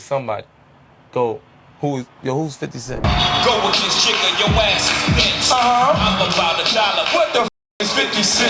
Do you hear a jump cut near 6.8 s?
no; 1 cut; at 3.0 s

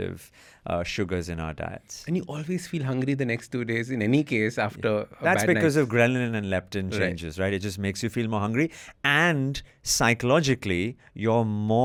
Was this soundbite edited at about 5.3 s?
no; 0 cuts

